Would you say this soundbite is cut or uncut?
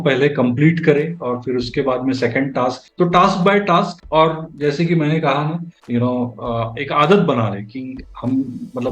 cut